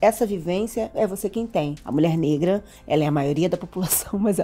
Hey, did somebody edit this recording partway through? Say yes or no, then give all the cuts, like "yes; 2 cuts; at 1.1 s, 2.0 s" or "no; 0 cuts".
yes; 1 cut; at 1.8 s